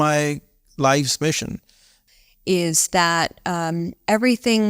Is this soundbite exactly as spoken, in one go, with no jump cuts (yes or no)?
no